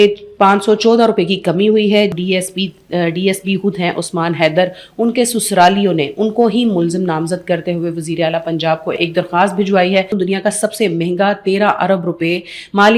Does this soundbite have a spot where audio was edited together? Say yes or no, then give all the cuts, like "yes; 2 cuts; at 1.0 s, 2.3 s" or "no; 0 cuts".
yes; 2 cuts; at 2.1 s, 10.1 s